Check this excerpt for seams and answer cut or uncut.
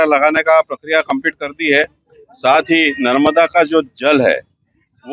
uncut